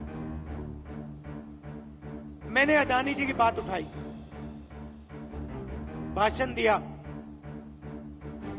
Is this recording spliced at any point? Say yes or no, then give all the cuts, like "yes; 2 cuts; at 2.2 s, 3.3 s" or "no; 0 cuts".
yes; 4 cuts; at 0.7 s, 2.1 s, 3.9 s, 5.7 s